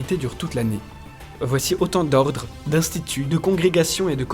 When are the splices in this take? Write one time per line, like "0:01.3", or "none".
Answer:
0:01.3